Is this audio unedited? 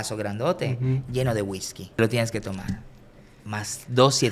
no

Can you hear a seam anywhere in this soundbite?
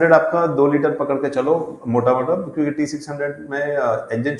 no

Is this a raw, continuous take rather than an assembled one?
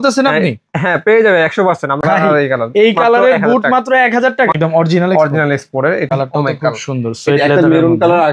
no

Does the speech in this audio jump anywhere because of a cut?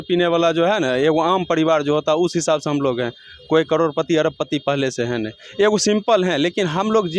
no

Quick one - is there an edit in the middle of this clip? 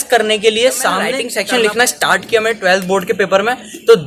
yes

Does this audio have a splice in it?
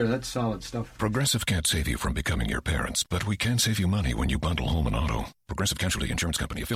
no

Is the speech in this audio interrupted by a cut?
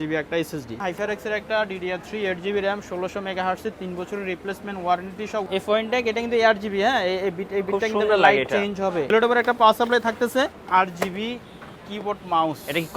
yes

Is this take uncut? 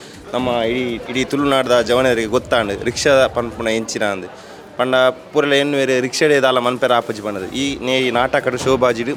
yes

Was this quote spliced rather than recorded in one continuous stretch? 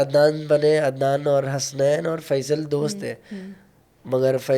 no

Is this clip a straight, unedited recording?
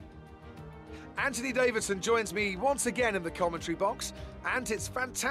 no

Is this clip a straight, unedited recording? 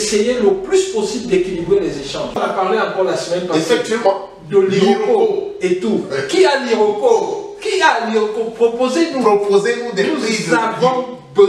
no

